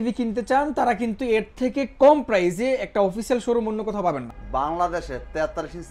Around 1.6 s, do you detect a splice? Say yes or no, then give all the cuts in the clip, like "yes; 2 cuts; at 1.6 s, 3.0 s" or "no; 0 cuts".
no; 1 cut; at 4.2 s